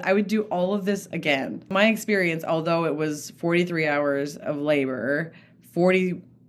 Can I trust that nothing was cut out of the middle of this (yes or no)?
no